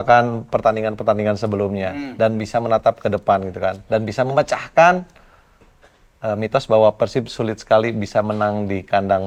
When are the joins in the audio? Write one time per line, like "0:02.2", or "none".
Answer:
none